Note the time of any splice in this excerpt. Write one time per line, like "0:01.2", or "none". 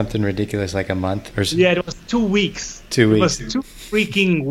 0:01.3